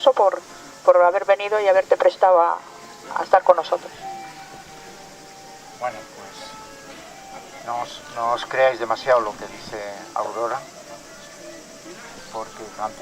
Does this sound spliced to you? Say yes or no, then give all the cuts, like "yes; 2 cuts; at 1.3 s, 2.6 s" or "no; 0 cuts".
yes; 1 cut; at 10.7 s